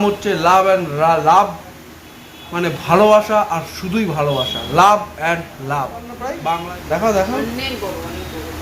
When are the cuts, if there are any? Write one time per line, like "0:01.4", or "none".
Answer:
0:06.6